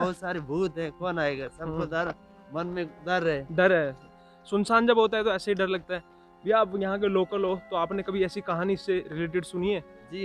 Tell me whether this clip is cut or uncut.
uncut